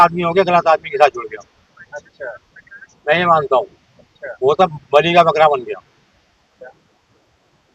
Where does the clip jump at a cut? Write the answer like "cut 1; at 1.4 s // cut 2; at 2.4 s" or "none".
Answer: none